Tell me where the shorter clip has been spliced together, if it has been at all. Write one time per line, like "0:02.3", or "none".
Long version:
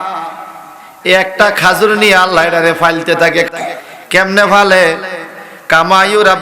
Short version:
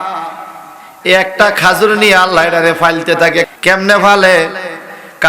0:03.5